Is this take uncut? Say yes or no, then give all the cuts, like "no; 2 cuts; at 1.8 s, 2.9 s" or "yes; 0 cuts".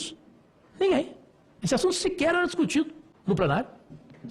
yes; 0 cuts